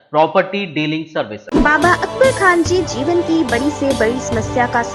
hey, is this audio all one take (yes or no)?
no